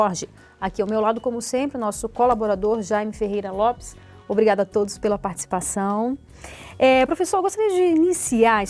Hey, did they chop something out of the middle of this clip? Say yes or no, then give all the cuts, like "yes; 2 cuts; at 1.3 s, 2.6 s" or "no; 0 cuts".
no; 0 cuts